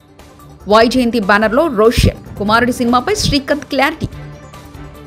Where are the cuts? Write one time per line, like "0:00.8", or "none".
none